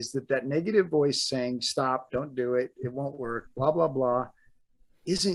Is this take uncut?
yes; 0 cuts

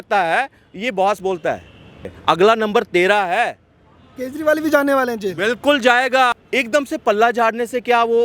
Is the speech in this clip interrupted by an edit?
yes; 2 cuts; at 2.1 s, 6.4 s

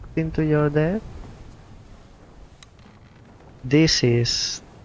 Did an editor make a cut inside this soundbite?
no; 0 cuts

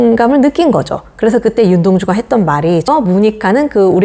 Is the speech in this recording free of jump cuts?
no; 1 cut; at 2.8 s

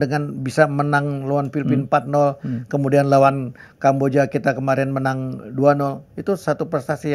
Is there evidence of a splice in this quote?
no; 0 cuts

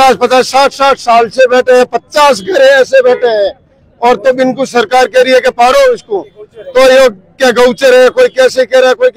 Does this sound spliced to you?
no; 0 cuts

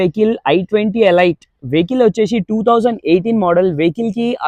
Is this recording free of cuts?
yes; 0 cuts

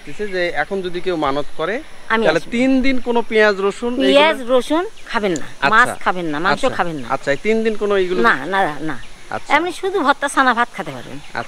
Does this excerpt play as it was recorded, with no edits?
yes; 0 cuts

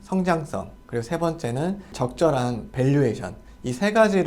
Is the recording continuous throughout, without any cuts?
yes; 0 cuts

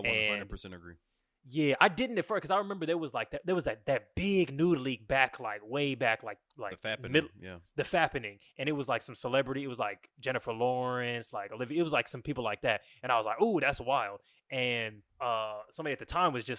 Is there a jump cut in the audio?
yes; 1 cut; at 15.0 s

